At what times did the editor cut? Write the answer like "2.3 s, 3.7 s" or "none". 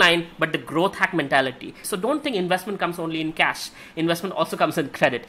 1.9 s